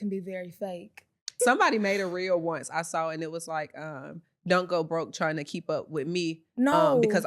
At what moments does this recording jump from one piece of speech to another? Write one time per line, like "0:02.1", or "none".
0:01.3

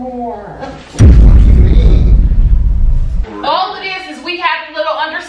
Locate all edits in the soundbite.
0:03.2

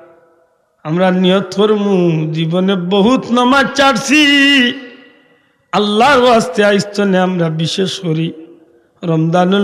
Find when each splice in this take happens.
none

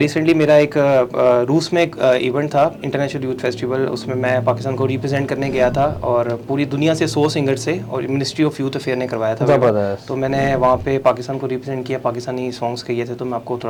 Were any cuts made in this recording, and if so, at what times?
none

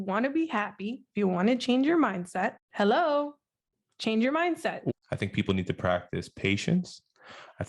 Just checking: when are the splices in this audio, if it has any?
0:04.9

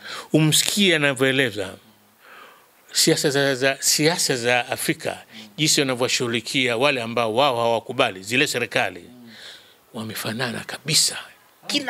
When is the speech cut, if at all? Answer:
none

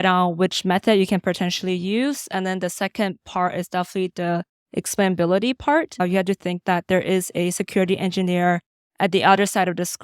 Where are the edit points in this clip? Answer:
0:06.0

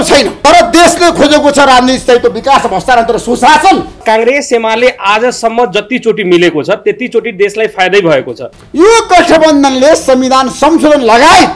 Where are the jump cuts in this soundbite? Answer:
0:04.0
0:08.4

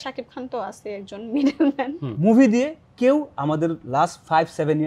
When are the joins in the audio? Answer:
0:02.1

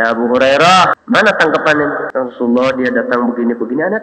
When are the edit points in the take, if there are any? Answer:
0:00.9
0:02.0

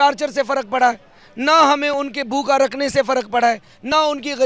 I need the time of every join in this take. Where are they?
none

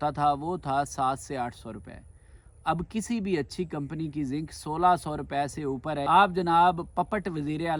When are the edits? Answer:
0:06.0

